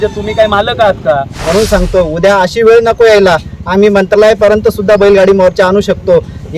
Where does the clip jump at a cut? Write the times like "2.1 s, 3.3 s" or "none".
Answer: 1.3 s